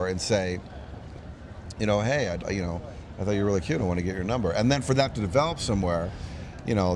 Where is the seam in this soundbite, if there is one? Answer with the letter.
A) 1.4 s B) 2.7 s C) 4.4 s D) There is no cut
D